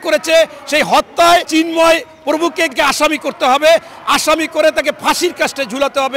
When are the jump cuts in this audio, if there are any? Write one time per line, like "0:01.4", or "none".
0:01.5
0:02.8